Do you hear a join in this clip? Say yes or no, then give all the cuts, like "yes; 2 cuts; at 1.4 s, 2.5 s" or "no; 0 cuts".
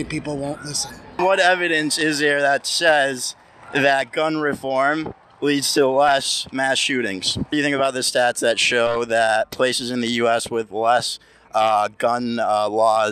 yes; 2 cuts; at 1.2 s, 7.5 s